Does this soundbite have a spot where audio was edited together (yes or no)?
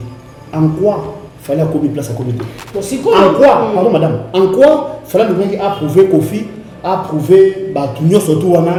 no